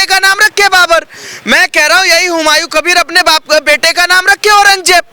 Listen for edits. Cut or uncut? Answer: uncut